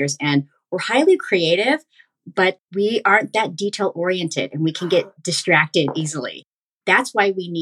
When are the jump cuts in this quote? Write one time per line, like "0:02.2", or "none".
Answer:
0:06.7